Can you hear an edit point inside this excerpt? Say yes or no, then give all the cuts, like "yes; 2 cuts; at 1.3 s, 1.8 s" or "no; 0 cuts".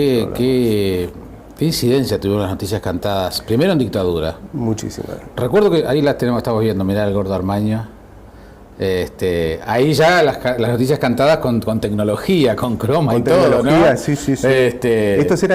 yes; 1 cut; at 10.9 s